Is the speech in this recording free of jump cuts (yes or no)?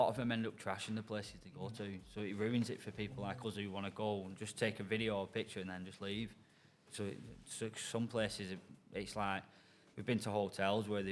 yes